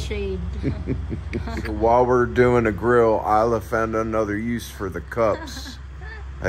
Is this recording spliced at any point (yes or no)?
yes